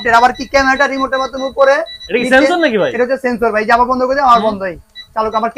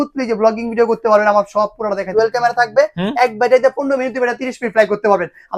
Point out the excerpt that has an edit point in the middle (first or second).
second